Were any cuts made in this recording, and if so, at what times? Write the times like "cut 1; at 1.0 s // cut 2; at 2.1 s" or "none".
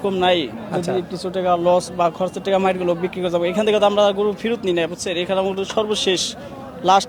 none